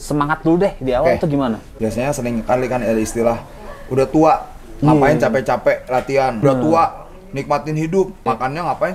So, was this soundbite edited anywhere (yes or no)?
yes